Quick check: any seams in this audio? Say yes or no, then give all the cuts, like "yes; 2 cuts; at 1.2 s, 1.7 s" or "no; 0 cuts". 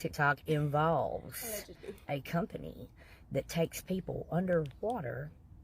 no; 0 cuts